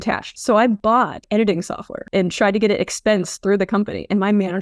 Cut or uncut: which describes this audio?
cut